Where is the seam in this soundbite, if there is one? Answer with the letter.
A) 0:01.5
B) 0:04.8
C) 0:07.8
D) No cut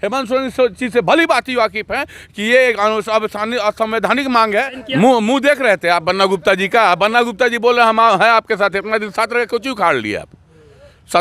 B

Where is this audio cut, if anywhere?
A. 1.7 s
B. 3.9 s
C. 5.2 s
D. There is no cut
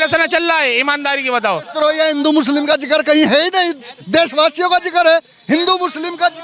A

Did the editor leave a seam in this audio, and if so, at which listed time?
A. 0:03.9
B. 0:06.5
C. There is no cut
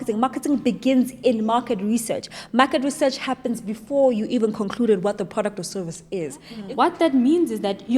B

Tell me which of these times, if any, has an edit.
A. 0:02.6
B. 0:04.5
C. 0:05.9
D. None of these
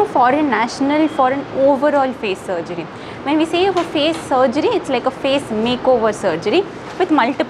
D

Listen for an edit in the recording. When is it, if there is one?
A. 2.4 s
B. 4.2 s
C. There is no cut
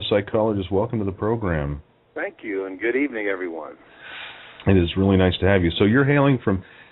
C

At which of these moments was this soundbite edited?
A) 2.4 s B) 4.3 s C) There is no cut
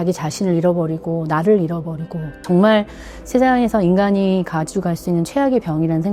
A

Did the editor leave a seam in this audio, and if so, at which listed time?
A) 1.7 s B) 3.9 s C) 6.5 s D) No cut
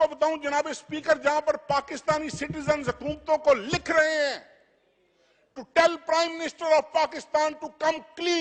D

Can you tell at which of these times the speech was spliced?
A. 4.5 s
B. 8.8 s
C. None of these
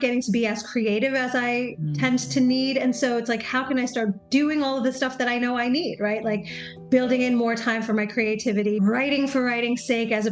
B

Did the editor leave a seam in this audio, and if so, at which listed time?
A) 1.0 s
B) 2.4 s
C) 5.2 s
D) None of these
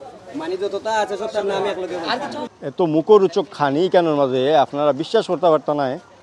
B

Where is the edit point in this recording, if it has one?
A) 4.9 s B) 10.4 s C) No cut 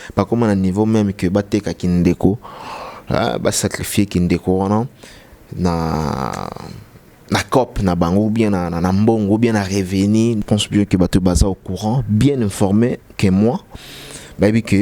B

